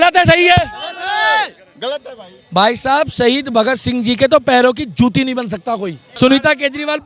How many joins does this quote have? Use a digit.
1